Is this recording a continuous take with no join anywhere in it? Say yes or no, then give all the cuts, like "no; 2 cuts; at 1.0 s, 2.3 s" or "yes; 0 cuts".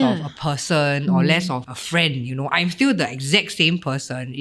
no; 1 cut; at 1.7 s